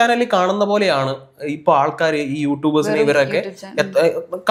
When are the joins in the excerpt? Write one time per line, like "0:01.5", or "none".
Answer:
none